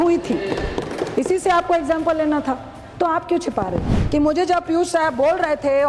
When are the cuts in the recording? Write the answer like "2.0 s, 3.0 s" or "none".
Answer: 3.9 s